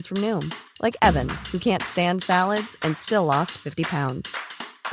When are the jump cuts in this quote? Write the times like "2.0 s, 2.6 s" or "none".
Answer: none